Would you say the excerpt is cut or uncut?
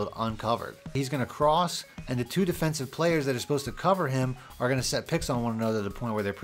cut